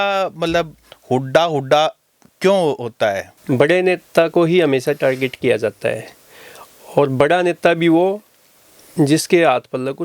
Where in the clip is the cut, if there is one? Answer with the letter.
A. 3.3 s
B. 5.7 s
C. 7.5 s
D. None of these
A